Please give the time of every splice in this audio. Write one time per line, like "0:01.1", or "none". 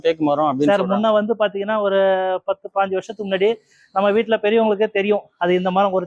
none